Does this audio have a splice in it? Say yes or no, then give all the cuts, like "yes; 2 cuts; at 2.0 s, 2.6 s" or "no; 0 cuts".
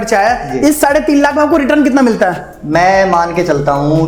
no; 0 cuts